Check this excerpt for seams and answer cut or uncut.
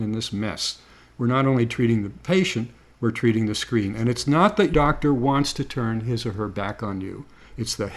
cut